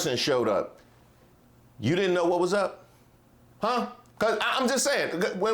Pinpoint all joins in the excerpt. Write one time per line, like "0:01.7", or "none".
none